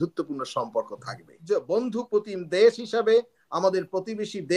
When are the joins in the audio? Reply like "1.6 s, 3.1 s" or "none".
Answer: 1.4 s